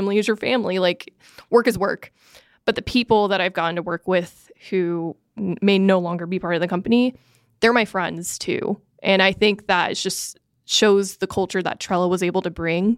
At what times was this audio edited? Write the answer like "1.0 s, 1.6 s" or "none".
none